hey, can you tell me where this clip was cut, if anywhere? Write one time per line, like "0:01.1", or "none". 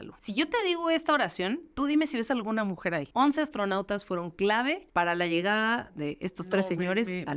none